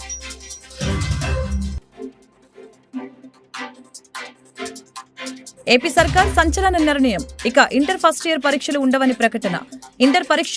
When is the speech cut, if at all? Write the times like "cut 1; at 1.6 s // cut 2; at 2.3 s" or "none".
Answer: cut 1; at 1.7 s